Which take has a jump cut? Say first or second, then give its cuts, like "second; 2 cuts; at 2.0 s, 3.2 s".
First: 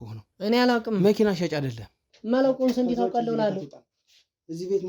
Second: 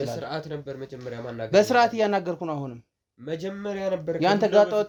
first; 1 cut; at 2.1 s